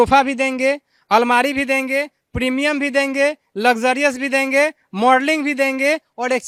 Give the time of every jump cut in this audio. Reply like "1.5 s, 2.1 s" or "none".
none